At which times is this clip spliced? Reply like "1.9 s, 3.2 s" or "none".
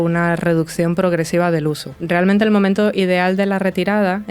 1.9 s